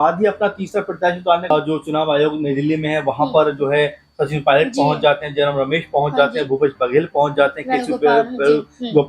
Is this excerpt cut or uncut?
cut